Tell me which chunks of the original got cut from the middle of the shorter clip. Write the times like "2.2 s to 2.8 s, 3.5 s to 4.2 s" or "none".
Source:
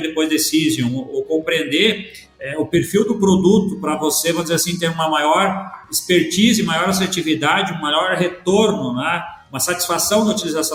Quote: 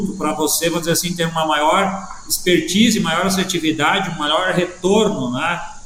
none